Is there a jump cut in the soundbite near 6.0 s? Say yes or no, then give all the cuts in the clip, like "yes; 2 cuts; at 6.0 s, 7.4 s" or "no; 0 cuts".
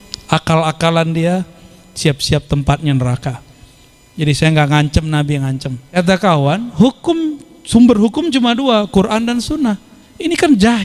yes; 1 cut; at 6.0 s